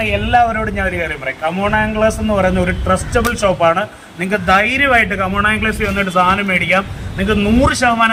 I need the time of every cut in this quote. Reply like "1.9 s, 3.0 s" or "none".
none